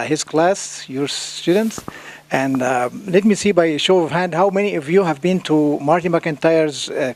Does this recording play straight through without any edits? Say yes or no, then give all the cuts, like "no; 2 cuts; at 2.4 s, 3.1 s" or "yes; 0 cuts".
yes; 0 cuts